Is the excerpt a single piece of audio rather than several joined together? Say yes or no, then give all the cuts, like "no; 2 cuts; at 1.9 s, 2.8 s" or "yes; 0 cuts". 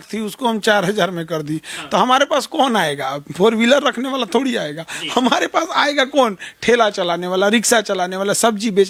yes; 0 cuts